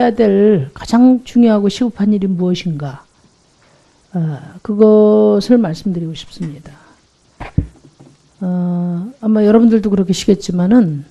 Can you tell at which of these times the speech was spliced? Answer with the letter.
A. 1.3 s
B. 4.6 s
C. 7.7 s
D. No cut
D